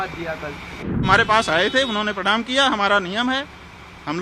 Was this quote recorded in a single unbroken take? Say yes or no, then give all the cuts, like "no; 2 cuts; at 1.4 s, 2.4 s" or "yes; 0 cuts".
no; 1 cut; at 1.0 s